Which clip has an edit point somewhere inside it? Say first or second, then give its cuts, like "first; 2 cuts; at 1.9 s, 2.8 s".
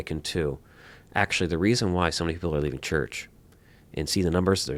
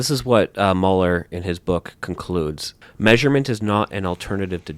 second; 1 cut; at 2.7 s